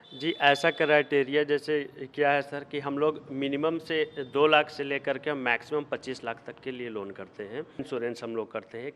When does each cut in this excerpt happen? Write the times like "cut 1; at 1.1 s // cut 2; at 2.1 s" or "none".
cut 1; at 7.9 s